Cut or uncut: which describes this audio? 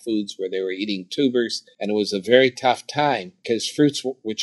cut